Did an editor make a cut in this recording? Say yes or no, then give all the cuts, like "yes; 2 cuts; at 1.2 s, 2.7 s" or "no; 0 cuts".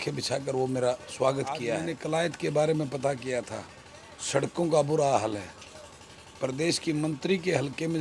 yes; 1 cut; at 1.9 s